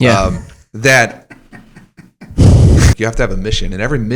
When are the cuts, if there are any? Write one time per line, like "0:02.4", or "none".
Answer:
0:03.0